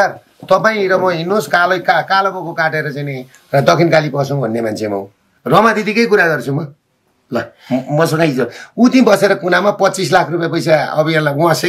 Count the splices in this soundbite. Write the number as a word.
one